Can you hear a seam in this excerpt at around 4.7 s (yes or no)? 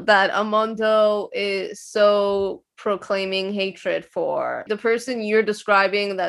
yes